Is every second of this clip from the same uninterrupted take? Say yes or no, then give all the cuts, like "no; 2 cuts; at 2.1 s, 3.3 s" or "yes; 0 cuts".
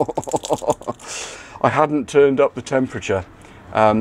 yes; 0 cuts